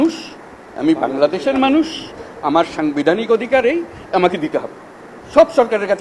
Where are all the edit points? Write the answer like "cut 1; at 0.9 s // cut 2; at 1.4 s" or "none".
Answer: none